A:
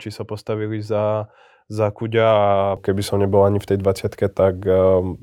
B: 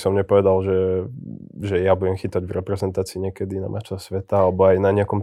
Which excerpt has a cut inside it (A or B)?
A